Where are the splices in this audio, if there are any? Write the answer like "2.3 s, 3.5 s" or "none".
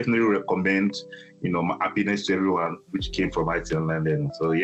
none